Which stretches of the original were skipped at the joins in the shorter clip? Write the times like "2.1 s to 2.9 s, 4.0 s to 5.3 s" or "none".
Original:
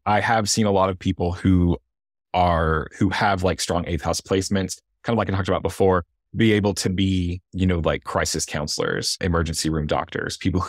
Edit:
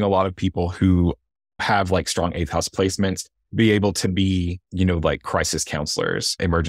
2.3 s to 3.1 s, 4.9 s to 6.2 s